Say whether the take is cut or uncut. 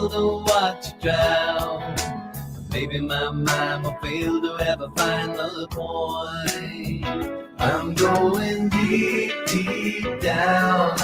cut